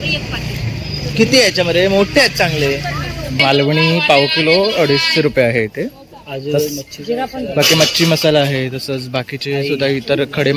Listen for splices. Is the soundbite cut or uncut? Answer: cut